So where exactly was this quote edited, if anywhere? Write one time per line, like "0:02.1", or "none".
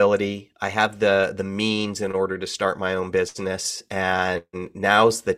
none